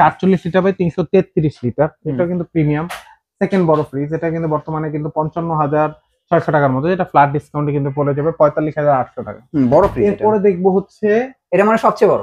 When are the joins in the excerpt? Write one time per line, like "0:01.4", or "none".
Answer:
none